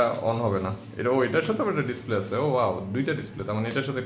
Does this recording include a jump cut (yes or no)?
no